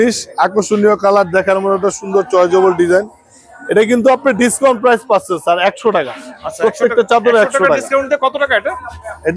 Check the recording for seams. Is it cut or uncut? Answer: uncut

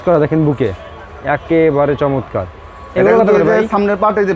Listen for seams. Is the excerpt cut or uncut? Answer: uncut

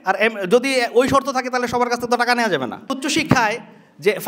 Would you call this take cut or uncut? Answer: cut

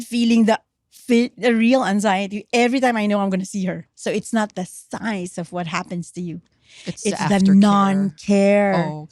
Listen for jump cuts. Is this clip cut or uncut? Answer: cut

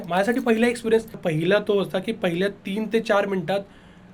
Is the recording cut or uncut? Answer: cut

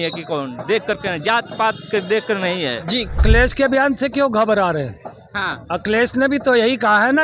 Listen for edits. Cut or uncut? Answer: cut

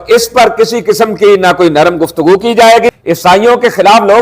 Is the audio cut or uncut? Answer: cut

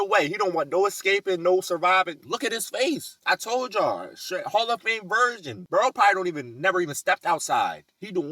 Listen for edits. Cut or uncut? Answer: cut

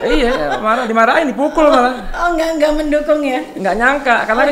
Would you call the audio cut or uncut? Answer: uncut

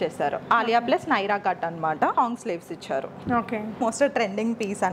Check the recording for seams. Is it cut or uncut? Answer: cut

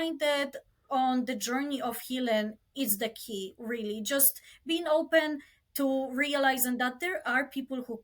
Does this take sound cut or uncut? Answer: uncut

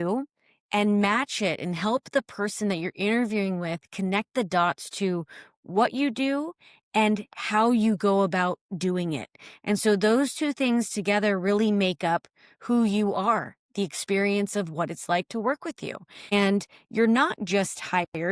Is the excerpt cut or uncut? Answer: cut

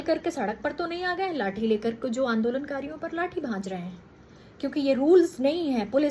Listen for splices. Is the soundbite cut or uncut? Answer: uncut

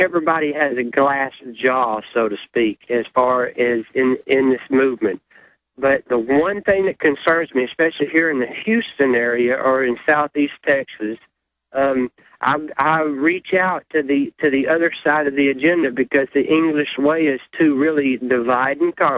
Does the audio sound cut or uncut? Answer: cut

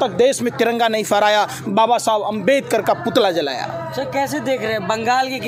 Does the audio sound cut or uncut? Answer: uncut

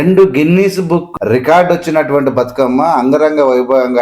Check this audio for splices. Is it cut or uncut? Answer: cut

